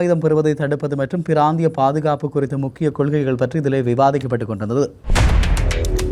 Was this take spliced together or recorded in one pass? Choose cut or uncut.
cut